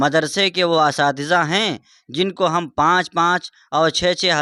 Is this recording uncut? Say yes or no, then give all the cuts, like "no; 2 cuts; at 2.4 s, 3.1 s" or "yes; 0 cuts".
yes; 0 cuts